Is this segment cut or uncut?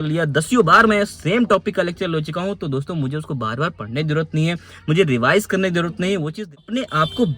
cut